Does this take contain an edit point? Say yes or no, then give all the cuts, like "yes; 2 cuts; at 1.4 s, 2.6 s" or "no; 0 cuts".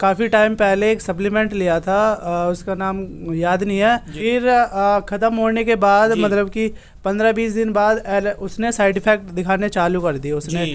yes; 1 cut; at 4.1 s